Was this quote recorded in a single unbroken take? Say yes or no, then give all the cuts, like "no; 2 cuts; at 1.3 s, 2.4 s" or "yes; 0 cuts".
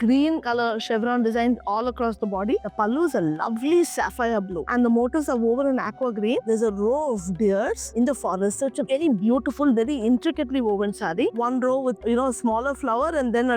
no; 4 cuts; at 2.6 s, 4.7 s, 6.4 s, 11.3 s